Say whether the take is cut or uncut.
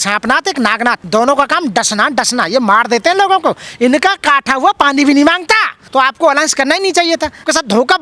cut